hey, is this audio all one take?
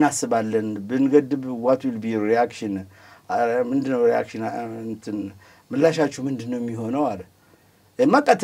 yes; 0 cuts

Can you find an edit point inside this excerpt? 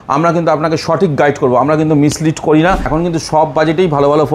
yes; 1 cut; at 2.9 s

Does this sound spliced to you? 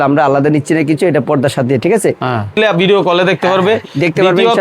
yes; 1 cut; at 2.6 s

